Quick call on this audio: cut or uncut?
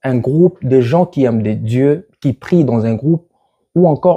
uncut